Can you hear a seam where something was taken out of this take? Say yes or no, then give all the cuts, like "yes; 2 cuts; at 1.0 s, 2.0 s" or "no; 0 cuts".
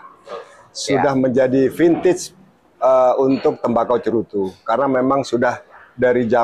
no; 0 cuts